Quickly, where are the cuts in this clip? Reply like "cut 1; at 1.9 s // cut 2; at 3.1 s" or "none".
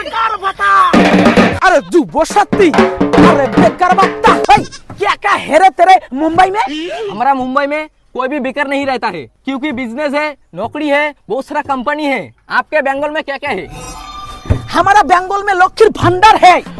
cut 1; at 1.6 s // cut 2; at 4.4 s

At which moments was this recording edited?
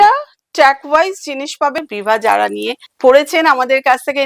cut 1; at 1.8 s // cut 2; at 2.8 s

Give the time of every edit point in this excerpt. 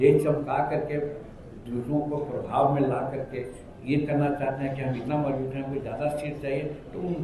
none

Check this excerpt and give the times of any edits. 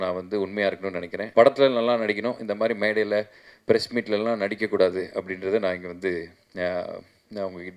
cut 1; at 1.3 s

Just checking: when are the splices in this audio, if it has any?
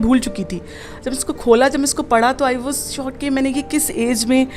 none

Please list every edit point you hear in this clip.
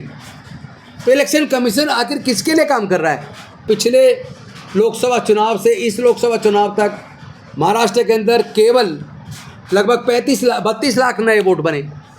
cut 1; at 3.6 s

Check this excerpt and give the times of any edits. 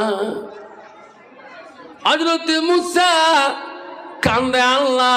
none

